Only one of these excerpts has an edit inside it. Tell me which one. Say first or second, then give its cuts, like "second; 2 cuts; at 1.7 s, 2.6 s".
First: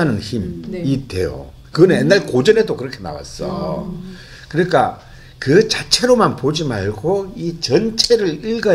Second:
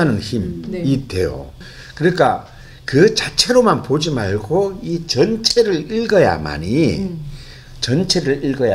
second; 1 cut; at 1.6 s